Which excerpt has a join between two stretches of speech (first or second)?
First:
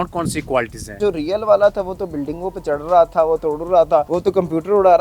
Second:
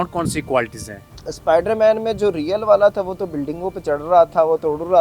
first